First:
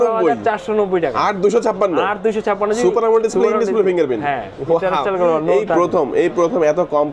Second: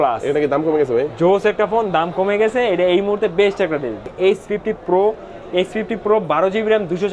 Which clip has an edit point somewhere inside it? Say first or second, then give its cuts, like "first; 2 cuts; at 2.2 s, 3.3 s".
second; 1 cut; at 4.1 s